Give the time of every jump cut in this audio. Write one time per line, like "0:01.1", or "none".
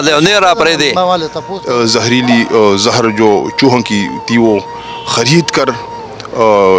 0:01.5